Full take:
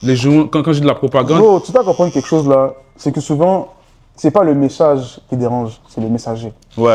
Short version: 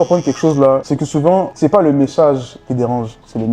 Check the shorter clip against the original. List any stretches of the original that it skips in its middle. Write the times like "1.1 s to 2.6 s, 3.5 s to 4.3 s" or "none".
3.1 s to 3.8 s